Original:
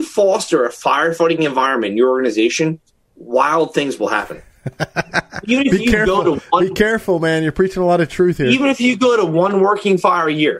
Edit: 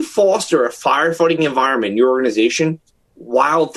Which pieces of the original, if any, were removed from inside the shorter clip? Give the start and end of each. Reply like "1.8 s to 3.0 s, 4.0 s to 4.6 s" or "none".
none